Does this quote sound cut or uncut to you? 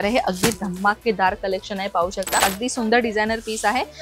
cut